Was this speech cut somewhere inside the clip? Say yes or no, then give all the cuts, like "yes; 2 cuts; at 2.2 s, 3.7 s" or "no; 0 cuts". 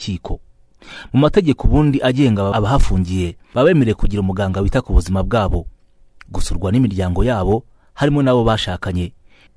yes; 1 cut; at 2.5 s